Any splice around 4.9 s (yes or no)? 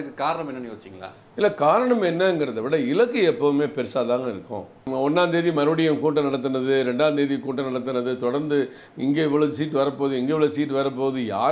yes